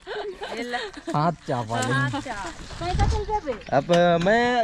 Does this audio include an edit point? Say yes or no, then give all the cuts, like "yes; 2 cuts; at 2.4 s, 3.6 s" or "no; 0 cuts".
no; 0 cuts